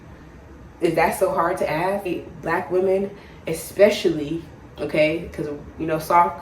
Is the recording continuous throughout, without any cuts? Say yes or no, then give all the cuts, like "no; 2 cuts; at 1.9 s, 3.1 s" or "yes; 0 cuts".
no; 1 cut; at 2.1 s